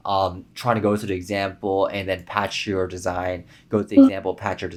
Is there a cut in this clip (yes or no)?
no